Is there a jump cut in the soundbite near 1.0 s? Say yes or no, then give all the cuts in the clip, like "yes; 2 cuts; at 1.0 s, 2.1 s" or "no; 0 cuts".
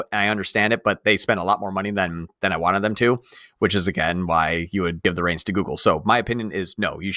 no; 1 cut; at 5.0 s